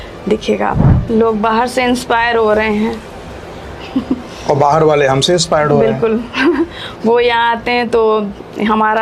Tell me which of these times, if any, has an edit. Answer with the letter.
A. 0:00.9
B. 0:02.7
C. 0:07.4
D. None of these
A